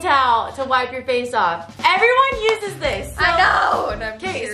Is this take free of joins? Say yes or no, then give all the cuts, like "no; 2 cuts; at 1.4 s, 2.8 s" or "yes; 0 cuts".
yes; 0 cuts